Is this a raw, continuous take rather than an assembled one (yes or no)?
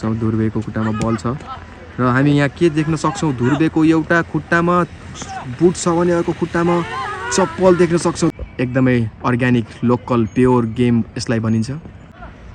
yes